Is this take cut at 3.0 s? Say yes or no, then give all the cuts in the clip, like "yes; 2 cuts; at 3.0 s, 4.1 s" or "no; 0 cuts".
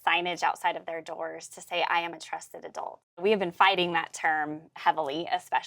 yes; 1 cut; at 3.0 s